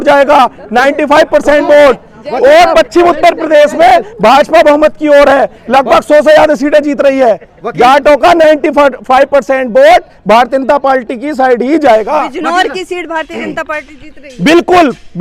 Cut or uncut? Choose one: uncut